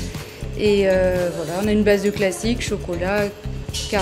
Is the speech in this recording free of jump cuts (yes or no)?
no